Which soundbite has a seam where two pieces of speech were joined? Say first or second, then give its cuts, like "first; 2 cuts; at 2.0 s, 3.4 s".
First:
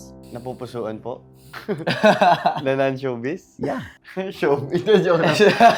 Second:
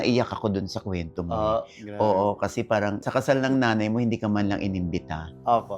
second; 1 cut; at 3.0 s